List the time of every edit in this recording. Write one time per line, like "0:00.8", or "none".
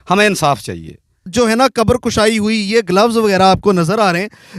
0:01.3